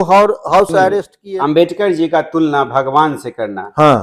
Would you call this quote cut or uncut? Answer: cut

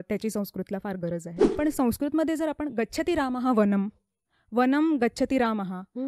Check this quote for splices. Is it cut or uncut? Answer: cut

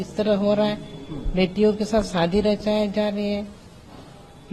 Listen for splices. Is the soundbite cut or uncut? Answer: uncut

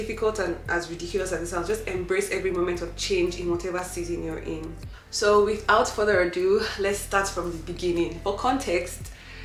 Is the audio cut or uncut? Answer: uncut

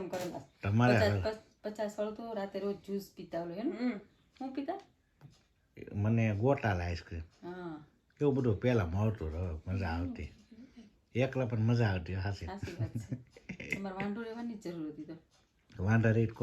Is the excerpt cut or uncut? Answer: uncut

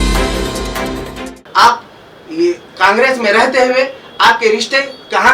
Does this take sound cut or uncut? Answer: cut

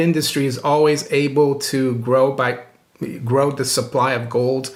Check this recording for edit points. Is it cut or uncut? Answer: uncut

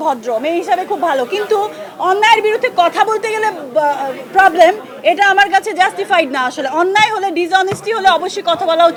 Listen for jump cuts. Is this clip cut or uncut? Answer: uncut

